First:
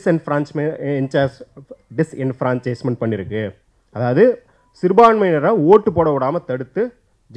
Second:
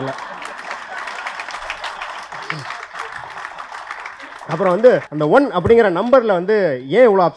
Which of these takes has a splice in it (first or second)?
second